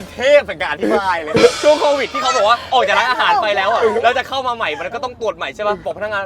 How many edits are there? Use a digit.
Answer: 1